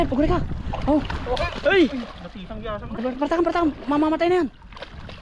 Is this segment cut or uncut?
cut